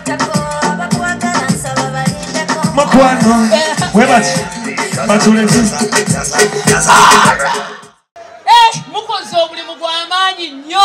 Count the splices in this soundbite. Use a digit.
1